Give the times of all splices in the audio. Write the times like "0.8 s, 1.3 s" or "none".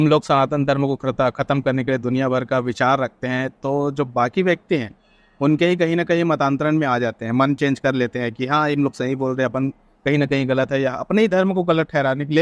none